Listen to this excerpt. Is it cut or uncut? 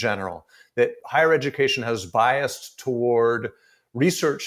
cut